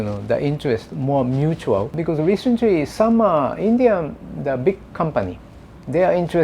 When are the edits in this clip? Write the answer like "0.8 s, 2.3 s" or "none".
1.9 s